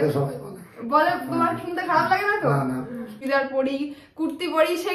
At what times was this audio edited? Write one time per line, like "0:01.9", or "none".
0:03.2